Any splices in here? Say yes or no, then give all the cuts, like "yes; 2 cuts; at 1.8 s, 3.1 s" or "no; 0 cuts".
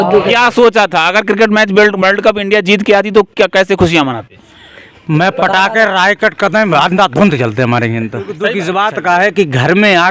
yes; 1 cut; at 8.4 s